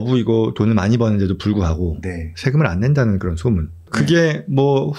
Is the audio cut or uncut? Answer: uncut